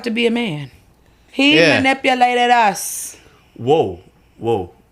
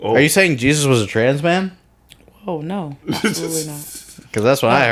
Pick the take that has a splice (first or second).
first